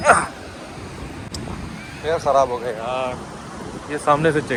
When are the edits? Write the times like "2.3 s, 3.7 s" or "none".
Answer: none